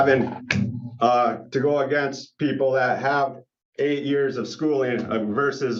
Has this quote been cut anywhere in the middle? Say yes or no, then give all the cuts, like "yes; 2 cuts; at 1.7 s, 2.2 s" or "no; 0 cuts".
no; 0 cuts